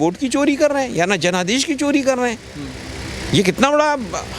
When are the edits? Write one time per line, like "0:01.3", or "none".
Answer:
none